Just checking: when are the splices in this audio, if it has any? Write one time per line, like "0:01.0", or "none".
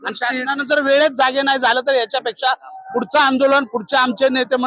none